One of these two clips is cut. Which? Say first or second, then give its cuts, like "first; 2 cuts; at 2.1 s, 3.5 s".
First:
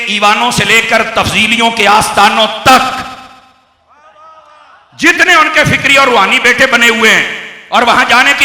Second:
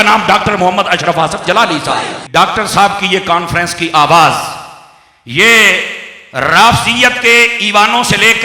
second; 1 cut; at 2.2 s